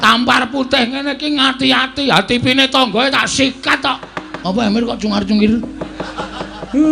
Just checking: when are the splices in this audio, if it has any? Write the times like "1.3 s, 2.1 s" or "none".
4.3 s